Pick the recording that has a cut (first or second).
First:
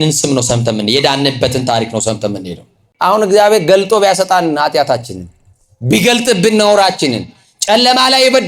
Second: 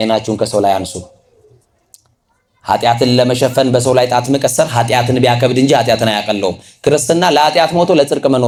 first